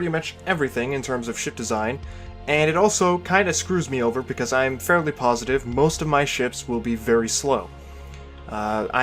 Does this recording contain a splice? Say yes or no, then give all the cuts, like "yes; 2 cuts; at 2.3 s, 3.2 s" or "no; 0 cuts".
yes; 1 cut; at 7.3 s